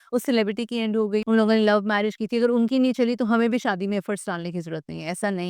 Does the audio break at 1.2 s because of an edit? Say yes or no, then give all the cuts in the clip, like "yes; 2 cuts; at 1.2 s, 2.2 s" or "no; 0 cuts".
yes; 1 cut; at 1.2 s